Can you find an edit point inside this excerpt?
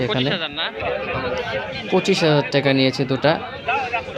no; 0 cuts

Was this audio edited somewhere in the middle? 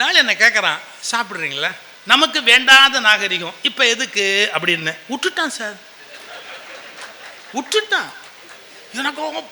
yes; 1 cut; at 1.9 s

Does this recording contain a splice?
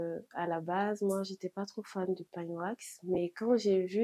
no; 0 cuts

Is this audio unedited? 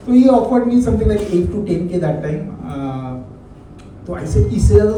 yes; 0 cuts

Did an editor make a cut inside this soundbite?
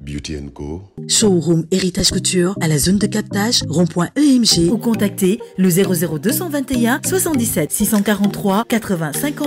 yes; 1 cut; at 1.1 s

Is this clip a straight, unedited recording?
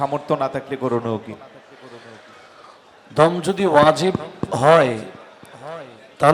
yes; 0 cuts

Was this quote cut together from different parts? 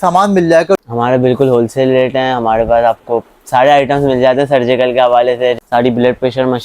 yes; 2 cuts; at 0.8 s, 5.6 s

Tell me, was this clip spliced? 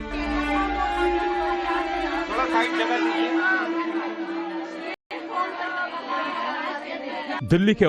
no; 0 cuts

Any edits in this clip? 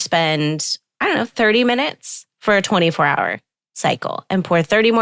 no; 0 cuts

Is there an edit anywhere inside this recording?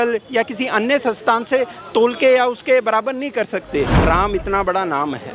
yes; 1 cut; at 3.9 s

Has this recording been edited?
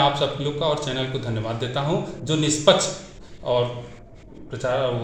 no; 0 cuts

